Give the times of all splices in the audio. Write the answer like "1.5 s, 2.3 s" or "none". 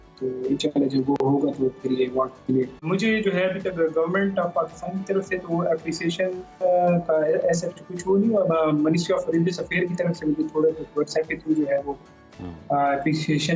2.8 s